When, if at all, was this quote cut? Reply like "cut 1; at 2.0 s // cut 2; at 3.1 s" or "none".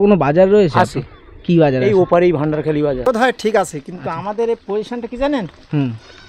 cut 1; at 3.0 s